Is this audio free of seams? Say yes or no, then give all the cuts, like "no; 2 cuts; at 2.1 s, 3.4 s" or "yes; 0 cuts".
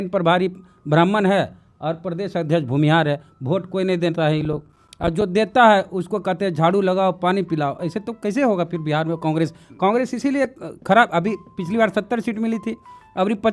yes; 0 cuts